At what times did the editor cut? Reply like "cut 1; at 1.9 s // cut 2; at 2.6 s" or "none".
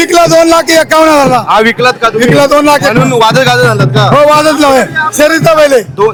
none